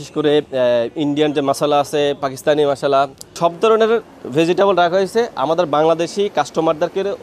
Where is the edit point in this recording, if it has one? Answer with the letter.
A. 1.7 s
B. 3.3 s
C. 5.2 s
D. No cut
B